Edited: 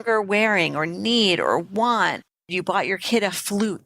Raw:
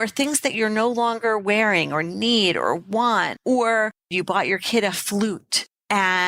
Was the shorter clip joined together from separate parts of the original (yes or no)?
yes